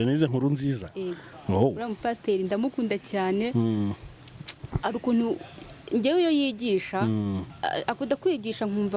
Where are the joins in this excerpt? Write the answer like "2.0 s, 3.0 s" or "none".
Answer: 7.5 s